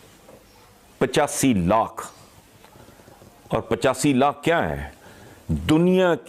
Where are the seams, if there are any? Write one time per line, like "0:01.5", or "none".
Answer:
none